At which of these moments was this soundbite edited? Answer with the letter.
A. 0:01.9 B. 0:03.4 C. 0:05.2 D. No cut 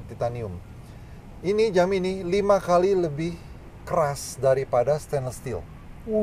D